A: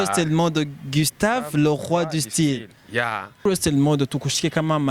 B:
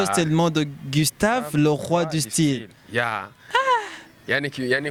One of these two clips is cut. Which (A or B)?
A